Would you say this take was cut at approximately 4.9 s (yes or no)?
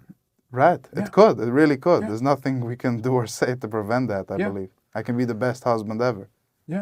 no